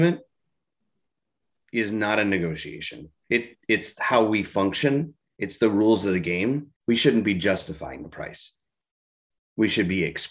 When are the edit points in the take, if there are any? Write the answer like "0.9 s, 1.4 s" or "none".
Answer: 6.7 s